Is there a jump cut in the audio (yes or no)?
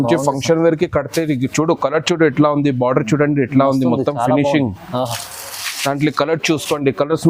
no